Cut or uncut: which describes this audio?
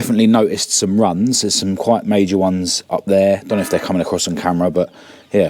uncut